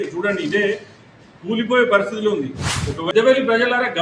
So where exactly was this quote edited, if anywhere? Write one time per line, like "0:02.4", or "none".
0:03.1